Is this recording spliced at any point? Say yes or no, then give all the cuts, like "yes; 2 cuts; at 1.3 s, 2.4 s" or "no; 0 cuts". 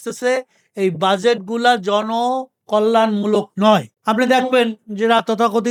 no; 0 cuts